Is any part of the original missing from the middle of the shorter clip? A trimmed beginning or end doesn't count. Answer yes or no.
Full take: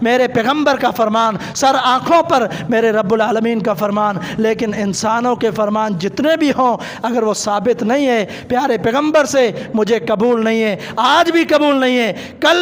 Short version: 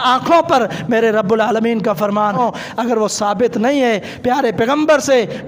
yes